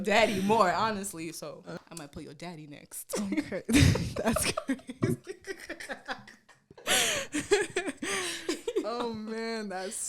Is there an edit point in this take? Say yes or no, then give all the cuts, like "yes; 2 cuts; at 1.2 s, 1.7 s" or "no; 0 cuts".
yes; 1 cut; at 1.9 s